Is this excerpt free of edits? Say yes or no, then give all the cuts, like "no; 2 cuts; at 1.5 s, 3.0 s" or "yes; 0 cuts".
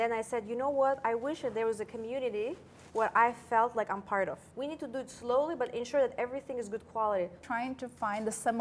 no; 2 cuts; at 4.5 s, 7.4 s